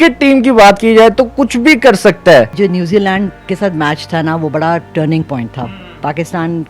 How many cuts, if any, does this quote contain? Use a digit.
1